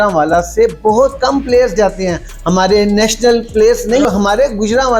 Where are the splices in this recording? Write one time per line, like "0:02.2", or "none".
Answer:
0:04.0